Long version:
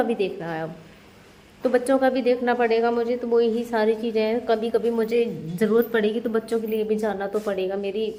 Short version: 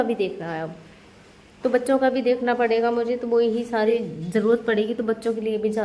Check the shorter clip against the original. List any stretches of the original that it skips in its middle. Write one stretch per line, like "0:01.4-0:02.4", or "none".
0:03.9-0:05.2